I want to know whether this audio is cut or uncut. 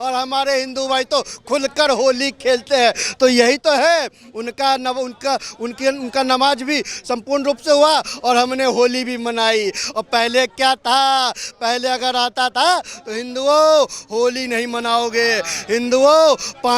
uncut